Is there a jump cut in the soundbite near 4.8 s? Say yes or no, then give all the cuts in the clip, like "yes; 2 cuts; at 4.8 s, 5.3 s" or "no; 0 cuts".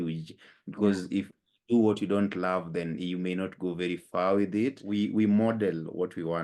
yes; 1 cut; at 4.8 s